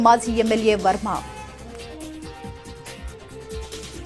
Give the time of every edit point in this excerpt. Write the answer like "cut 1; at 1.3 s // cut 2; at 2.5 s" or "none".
cut 1; at 2.8 s